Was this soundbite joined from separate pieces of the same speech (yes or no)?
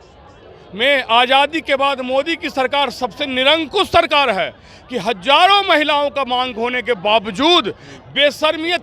no